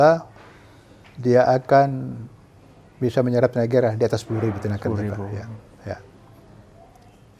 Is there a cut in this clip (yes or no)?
no